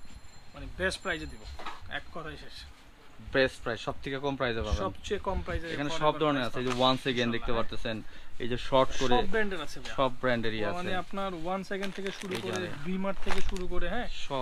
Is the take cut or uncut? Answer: uncut